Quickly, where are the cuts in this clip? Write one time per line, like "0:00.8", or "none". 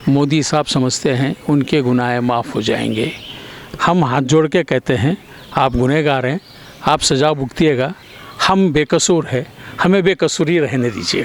none